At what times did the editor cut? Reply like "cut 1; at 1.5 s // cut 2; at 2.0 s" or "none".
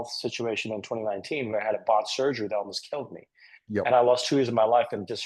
none